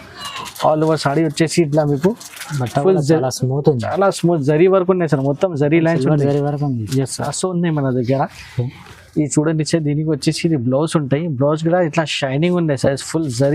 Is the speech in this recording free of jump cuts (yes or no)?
no